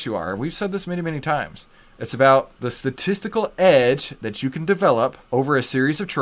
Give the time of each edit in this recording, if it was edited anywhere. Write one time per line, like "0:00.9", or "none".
0:02.6
0:05.2